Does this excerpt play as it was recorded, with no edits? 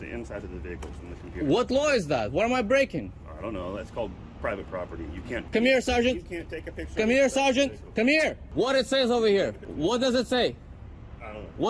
no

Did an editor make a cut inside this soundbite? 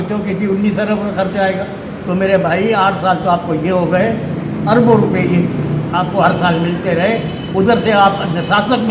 no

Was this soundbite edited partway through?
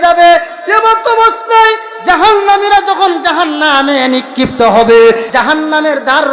yes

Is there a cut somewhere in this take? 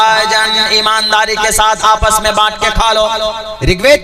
no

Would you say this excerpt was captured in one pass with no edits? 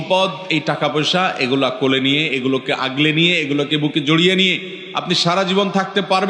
yes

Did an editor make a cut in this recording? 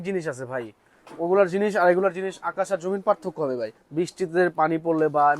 yes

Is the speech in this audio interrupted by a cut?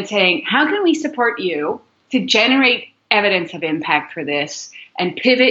no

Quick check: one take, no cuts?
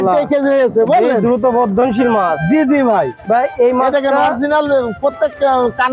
yes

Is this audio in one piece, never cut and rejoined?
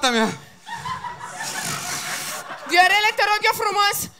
yes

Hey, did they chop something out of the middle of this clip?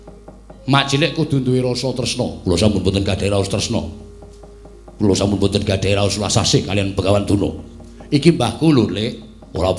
no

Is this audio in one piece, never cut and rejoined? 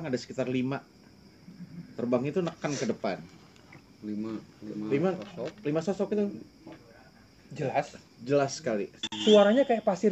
no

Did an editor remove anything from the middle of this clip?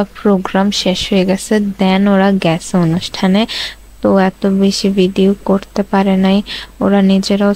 no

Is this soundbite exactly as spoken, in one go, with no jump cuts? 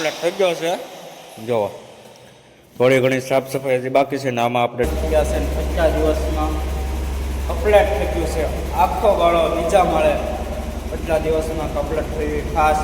no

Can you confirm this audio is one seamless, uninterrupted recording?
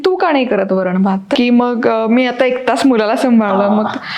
no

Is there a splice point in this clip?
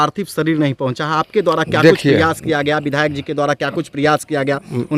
no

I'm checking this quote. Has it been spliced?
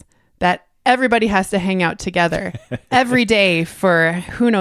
no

